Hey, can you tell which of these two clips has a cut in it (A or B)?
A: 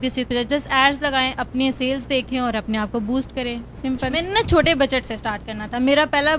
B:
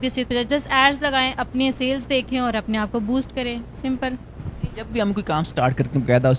A